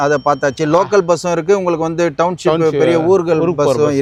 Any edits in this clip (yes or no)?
no